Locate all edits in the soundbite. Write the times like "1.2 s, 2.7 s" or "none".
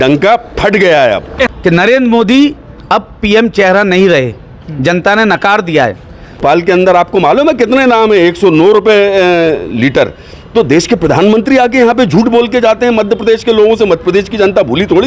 1.5 s, 6.4 s

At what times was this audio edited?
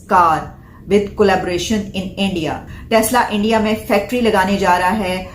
2.6 s

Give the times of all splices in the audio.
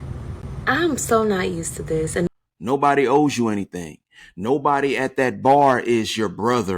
2.3 s

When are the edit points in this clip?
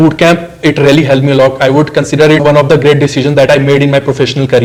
none

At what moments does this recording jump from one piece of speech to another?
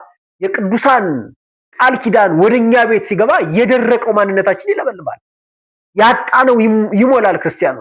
none

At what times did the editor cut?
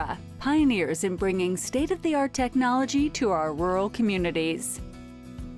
4.6 s

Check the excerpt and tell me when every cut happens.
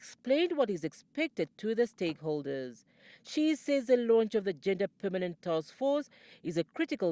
2.8 s

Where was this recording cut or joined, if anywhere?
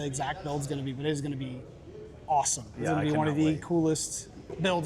none

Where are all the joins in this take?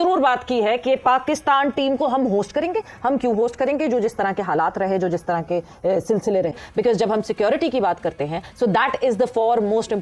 none

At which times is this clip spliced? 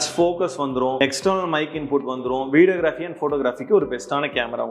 1.0 s

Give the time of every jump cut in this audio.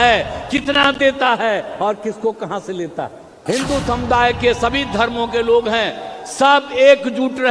3.4 s

